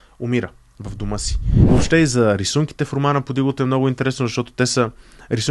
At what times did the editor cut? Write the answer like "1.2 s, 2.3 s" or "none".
1.5 s